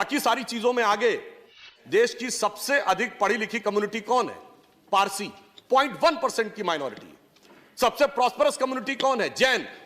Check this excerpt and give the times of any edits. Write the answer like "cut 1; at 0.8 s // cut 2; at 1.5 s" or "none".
cut 1; at 1.7 s